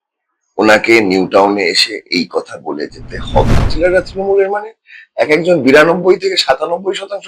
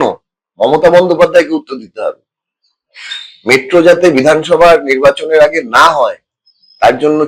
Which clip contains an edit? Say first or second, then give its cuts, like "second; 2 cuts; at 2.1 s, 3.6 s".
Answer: first; 1 cut; at 3.7 s